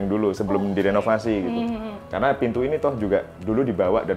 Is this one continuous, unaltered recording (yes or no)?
no